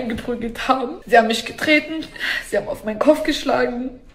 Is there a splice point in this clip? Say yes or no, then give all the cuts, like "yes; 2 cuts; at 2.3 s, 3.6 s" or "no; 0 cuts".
yes; 1 cut; at 1.0 s